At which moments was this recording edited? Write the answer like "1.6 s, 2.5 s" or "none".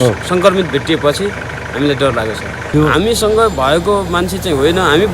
2.7 s